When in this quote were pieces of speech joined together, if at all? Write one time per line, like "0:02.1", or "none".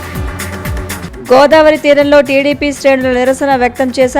0:01.1